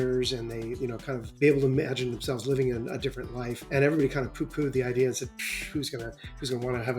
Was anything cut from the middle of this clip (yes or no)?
yes